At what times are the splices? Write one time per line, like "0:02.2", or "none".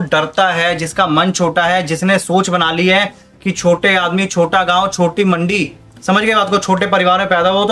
none